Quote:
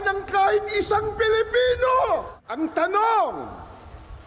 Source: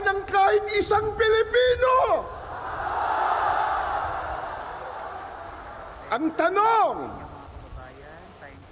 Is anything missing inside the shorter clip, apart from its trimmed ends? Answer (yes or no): yes